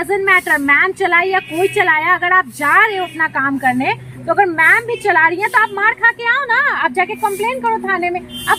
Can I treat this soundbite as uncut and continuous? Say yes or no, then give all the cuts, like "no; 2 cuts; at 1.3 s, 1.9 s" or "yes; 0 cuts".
yes; 0 cuts